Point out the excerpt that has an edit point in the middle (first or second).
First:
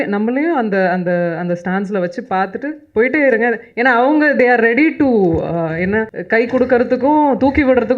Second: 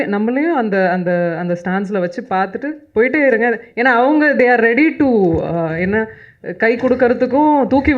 first